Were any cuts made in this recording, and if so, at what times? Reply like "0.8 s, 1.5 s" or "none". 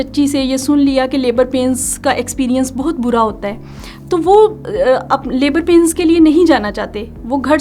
none